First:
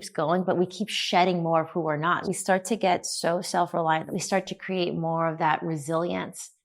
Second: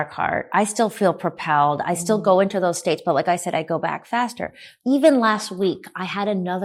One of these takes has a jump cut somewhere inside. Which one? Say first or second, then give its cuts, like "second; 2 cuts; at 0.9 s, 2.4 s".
first; 2 cuts; at 2.3 s, 4.1 s